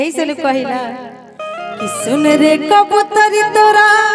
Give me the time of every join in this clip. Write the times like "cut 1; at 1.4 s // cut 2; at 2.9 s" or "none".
none